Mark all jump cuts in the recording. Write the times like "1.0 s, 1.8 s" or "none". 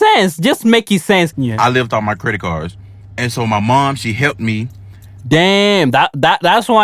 1.4 s